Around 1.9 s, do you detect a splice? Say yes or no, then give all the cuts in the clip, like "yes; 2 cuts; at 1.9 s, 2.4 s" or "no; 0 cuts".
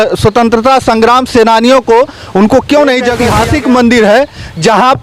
no; 1 cut; at 3.2 s